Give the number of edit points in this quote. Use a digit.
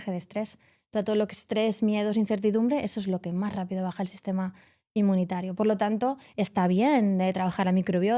0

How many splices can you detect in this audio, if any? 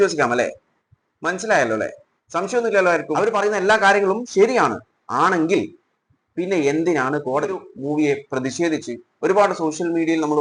2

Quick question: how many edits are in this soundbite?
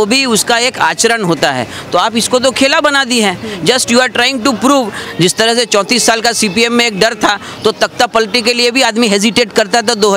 1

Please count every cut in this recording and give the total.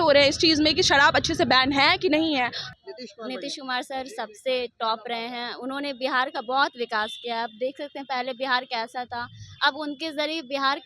1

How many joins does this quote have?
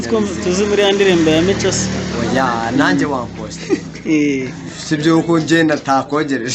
0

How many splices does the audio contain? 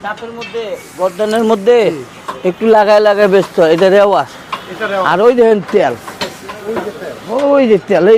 0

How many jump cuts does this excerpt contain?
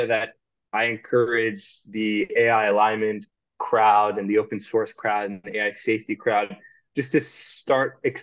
0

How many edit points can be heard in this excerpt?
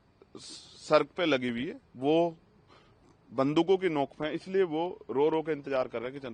0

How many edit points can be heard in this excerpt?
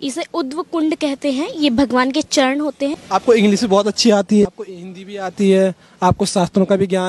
2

